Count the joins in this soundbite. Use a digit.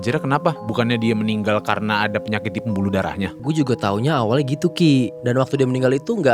1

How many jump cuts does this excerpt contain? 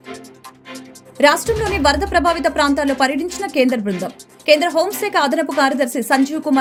0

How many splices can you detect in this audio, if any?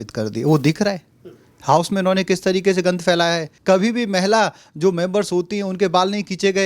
1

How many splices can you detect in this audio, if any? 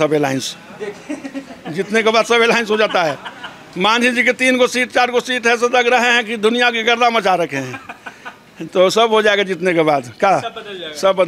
0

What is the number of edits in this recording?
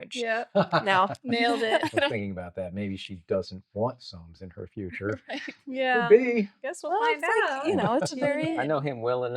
1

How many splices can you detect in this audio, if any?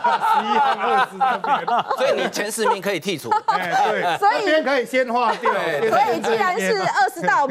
0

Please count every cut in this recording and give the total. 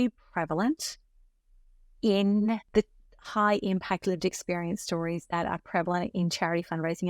0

